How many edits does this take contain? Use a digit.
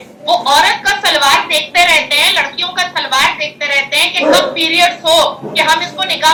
0